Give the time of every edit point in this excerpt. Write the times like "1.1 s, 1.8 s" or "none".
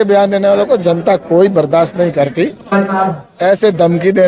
2.7 s